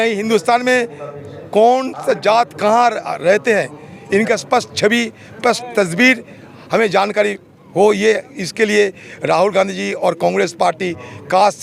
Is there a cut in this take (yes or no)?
no